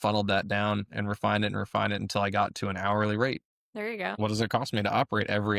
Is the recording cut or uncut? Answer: uncut